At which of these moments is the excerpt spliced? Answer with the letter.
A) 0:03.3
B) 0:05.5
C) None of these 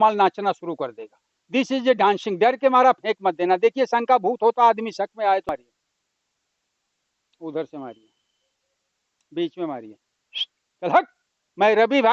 B